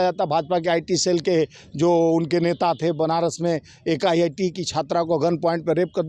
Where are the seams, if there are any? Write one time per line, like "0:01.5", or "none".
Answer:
none